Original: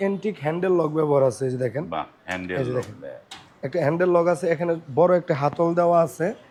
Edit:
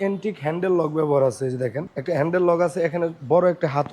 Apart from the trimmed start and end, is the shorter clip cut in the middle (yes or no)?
yes